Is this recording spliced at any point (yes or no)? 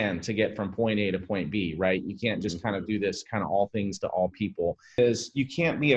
yes